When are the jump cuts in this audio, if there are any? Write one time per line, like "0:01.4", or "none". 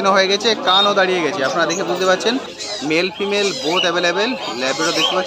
0:02.6